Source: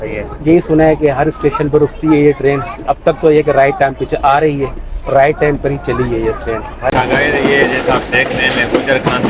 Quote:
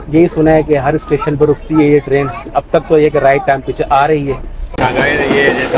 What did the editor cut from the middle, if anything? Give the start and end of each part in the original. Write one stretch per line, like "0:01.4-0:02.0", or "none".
0:05.1-0:06.9